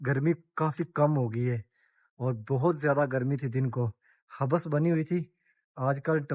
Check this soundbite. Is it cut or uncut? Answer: uncut